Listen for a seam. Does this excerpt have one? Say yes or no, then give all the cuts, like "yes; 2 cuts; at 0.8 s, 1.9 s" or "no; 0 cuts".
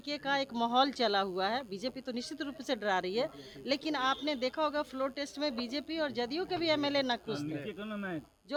no; 0 cuts